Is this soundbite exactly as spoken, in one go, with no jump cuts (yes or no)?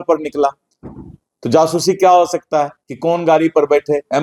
yes